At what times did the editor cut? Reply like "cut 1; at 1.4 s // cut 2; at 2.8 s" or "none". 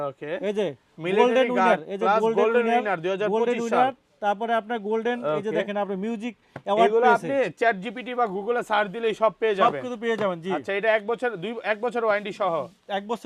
none